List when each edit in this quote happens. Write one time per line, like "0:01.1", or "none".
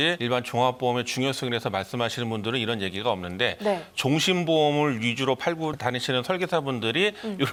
none